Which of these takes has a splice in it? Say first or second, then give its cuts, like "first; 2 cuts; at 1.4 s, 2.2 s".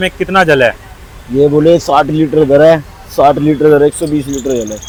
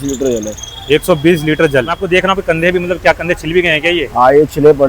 second; 1 cut; at 2.0 s